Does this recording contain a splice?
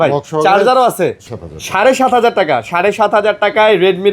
yes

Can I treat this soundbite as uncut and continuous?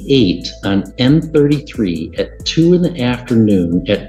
yes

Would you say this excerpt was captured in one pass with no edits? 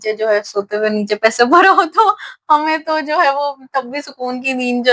yes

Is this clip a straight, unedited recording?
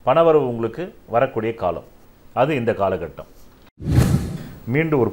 no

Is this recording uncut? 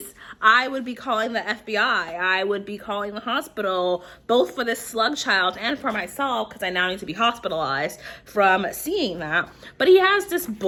yes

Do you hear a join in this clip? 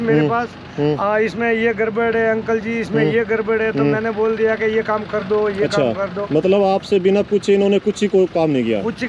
no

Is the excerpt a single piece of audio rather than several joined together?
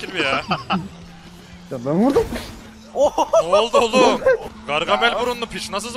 no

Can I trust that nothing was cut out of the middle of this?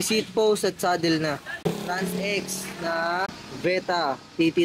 yes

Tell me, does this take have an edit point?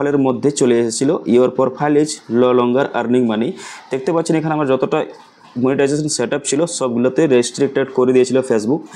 no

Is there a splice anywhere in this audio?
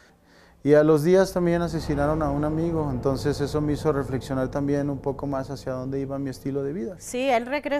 yes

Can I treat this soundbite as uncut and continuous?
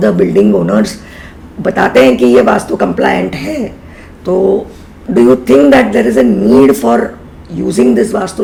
yes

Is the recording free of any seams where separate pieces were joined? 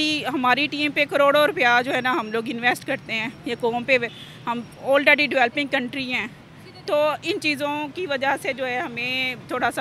yes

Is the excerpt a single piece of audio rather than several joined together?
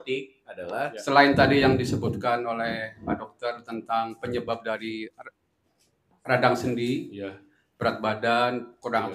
no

